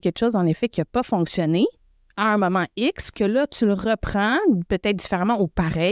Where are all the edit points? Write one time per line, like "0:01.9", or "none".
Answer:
none